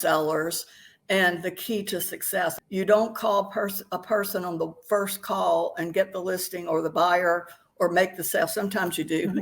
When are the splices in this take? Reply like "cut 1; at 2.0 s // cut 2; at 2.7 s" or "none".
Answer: cut 1; at 2.6 s